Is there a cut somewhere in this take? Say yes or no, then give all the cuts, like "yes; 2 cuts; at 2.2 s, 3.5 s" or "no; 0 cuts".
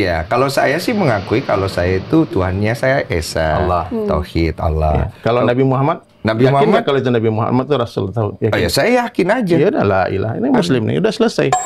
yes; 1 cut; at 5.6 s